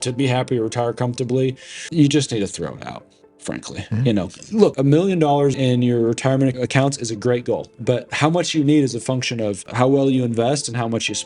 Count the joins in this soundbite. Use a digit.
2